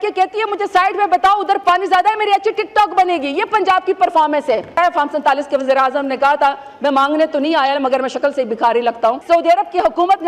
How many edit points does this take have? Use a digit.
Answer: 2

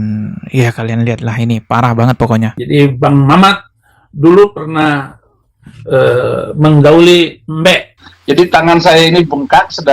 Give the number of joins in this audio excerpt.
1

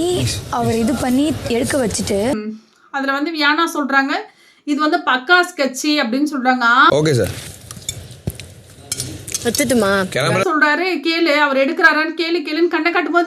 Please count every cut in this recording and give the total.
3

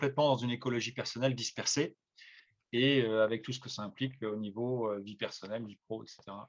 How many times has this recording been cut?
0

